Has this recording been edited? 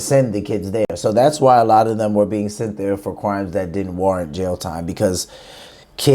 no; 0 cuts

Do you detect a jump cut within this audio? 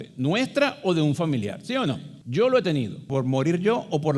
yes; 2 cuts; at 2.1 s, 3.0 s

